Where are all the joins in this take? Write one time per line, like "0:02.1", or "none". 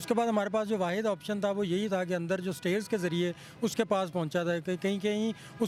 none